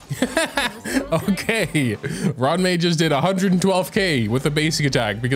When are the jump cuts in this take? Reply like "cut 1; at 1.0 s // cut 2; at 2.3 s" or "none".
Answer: none